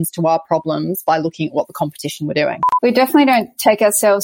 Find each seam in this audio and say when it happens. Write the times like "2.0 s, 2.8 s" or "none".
2.6 s